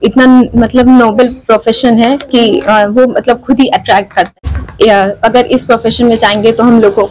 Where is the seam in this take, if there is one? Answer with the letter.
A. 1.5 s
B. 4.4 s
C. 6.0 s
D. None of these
B